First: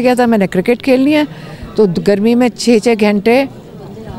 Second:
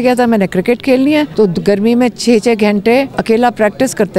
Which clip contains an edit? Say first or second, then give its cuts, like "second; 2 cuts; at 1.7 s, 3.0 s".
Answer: second; 2 cuts; at 1.3 s, 3.2 s